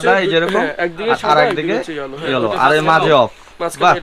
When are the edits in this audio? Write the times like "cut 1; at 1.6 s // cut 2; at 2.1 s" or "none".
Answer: none